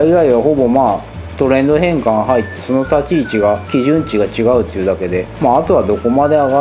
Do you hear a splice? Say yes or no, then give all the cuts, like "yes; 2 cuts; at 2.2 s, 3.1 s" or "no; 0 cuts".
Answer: no; 0 cuts